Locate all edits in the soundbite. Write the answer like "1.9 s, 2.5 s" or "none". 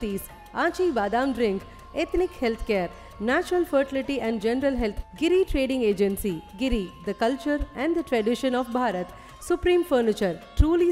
none